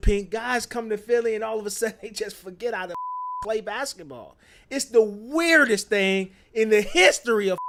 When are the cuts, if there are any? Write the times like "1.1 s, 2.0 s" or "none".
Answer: none